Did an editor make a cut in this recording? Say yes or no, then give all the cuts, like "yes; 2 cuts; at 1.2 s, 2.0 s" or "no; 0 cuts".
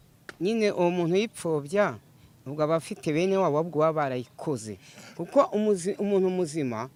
no; 0 cuts